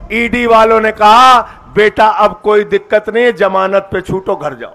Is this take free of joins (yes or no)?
yes